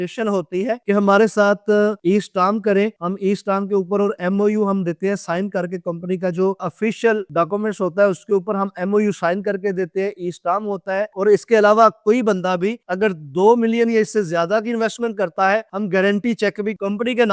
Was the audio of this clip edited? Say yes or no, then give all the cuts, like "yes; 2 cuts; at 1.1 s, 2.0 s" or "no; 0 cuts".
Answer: no; 0 cuts